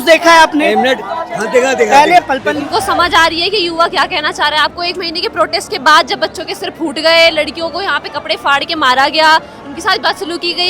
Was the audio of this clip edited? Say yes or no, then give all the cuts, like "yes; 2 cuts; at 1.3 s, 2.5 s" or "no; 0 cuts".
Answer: yes; 1 cut; at 2.4 s